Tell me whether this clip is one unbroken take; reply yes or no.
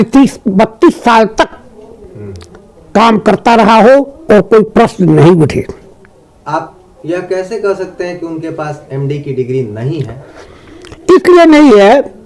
yes